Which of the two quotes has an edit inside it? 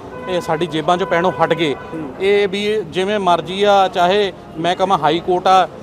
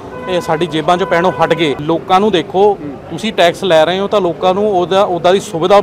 second; 1 cut; at 1.8 s

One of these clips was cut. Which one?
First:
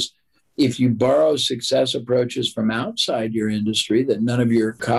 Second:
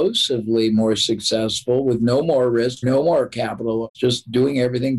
second; 2 cuts; at 2.8 s, 3.9 s

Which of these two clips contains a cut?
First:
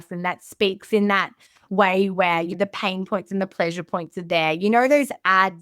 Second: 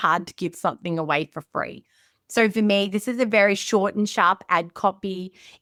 first; 1 cut; at 2.5 s

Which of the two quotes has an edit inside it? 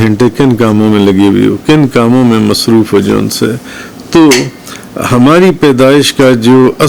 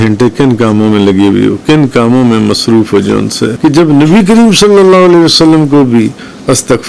second; 1 cut; at 3.5 s

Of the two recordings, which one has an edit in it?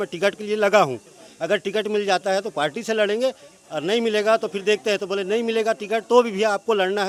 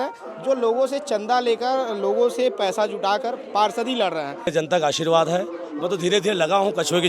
second; 1 cut; at 4.5 s

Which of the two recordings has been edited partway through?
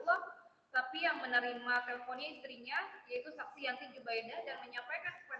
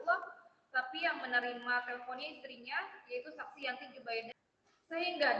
second; 1 cut; at 4.3 s

